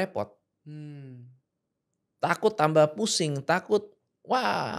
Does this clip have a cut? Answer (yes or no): no